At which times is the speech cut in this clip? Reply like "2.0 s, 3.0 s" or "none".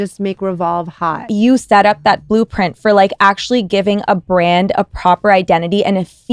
1.3 s